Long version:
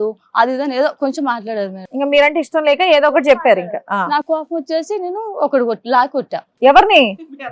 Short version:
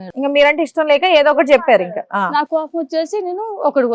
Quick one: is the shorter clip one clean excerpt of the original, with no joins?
yes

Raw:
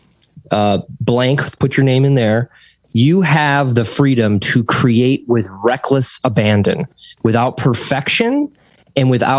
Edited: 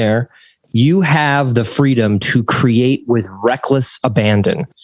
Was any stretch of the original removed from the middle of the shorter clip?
no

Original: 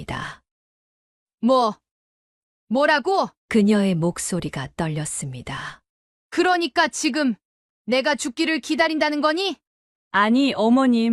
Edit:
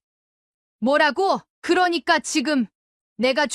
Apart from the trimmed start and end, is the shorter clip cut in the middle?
yes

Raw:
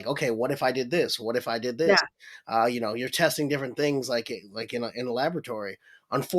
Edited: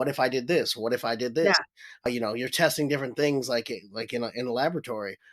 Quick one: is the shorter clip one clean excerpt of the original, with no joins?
no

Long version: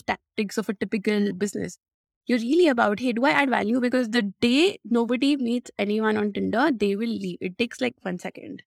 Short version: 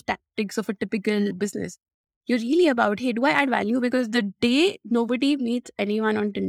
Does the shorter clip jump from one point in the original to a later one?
no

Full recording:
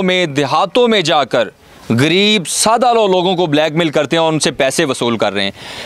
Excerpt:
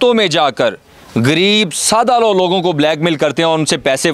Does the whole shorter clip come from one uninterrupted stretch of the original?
yes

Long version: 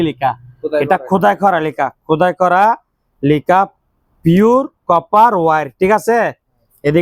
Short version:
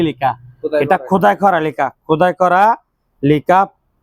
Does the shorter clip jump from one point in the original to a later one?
no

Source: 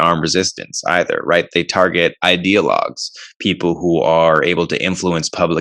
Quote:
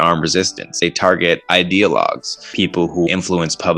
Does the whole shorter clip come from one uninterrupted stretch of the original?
no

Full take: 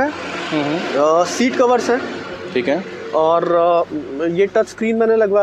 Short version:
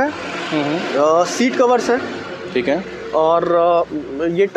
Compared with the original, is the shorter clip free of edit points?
yes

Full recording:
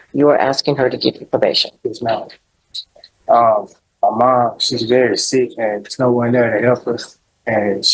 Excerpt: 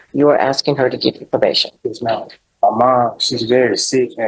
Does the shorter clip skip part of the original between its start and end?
yes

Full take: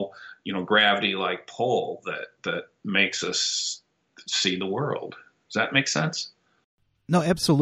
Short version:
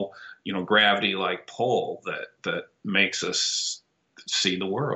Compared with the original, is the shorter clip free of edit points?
yes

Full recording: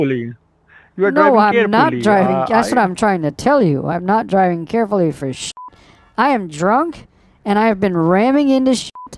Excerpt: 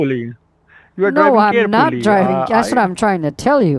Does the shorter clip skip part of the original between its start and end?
no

